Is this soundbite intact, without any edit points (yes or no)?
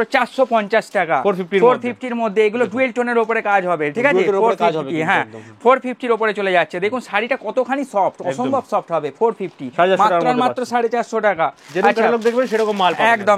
yes